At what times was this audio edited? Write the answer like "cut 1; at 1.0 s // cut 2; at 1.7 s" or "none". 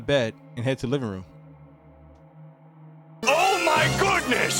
none